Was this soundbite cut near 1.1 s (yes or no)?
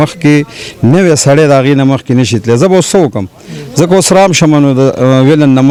no